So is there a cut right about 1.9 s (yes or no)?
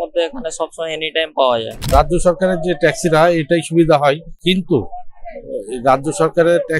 yes